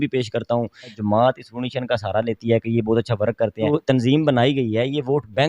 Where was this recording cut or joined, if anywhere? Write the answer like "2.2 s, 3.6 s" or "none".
1.0 s, 3.7 s